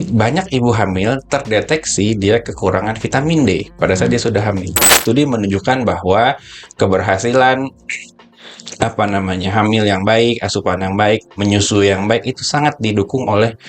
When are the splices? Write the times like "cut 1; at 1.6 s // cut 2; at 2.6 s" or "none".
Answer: cut 1; at 5.0 s

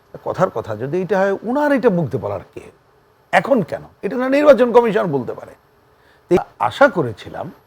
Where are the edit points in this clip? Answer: cut 1; at 6.4 s

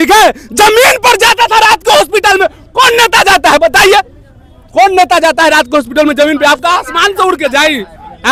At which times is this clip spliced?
none

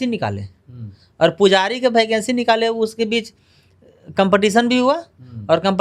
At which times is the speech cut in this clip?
none

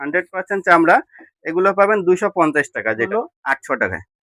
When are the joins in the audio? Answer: cut 1; at 3.1 s

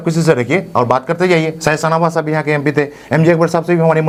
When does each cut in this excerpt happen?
none

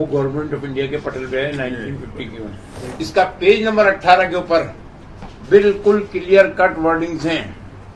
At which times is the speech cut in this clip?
cut 1; at 2.8 s

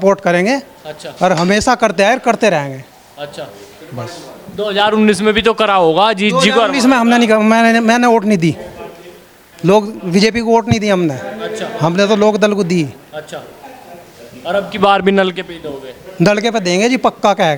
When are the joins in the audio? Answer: none

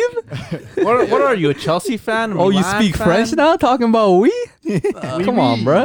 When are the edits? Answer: none

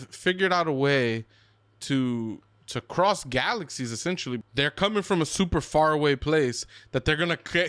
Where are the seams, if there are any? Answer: cut 1; at 4.5 s

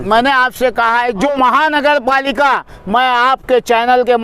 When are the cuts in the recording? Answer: cut 1; at 1.3 s

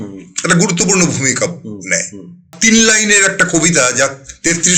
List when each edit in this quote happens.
cut 1; at 2.5 s

